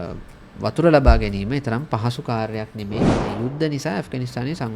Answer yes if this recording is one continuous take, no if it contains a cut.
no